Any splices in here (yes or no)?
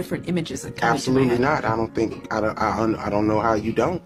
no